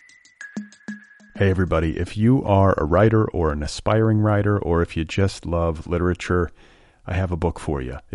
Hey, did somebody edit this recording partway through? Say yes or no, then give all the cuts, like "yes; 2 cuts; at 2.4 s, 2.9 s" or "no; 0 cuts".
yes; 1 cut; at 0.9 s